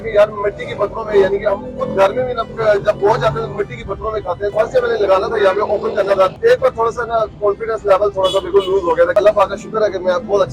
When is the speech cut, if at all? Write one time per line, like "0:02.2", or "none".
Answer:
0:02.5
0:04.5
0:06.3
0:09.1

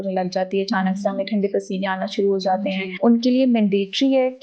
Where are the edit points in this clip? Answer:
0:02.9

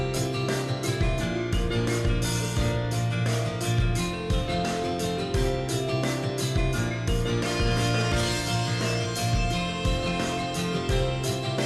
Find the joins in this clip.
0:02.3

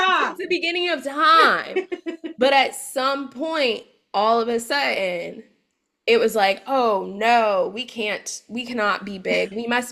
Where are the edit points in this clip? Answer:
none

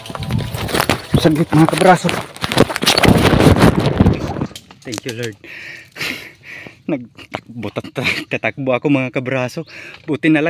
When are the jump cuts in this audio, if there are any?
0:04.2

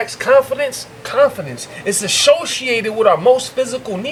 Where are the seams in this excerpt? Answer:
none

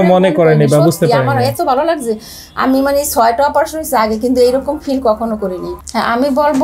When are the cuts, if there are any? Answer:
0:05.8

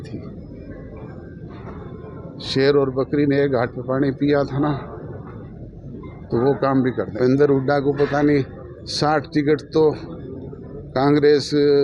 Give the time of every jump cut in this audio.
0:07.1

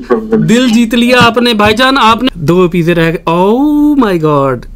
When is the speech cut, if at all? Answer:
0:02.3

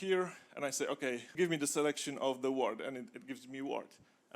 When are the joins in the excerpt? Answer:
0:01.3

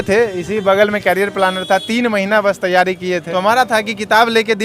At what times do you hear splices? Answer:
0:03.3

